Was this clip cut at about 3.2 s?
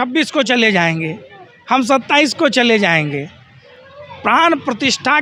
no; 0 cuts

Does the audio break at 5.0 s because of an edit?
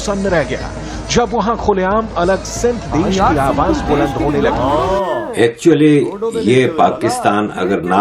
yes; 1 cut; at 5.0 s

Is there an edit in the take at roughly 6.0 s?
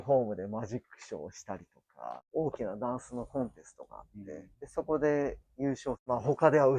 yes; 3 cuts; at 2.1 s, 4.6 s, 6.0 s

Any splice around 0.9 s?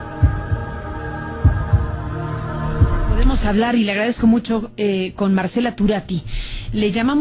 yes; 1 cut; at 0.9 s

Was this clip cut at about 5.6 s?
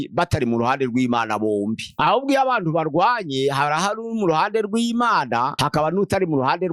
yes; 2 cuts; at 1.9 s, 5.6 s

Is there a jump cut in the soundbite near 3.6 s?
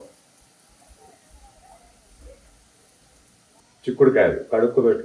yes; 1 cut; at 3.6 s

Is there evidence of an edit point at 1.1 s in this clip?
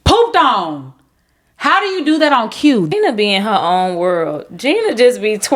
no; 1 cut; at 2.9 s

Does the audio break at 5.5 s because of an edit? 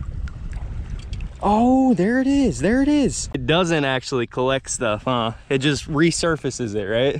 no; 1 cut; at 3.3 s

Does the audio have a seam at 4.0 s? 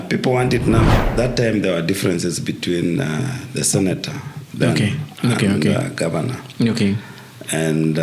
no; 1 cut; at 1.0 s

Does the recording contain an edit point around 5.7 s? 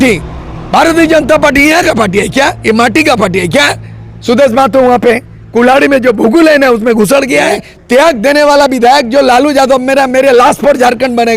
no; 1 cut; at 7.6 s

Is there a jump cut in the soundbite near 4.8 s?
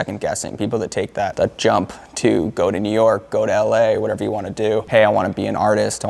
yes; 1 cut; at 4.8 s

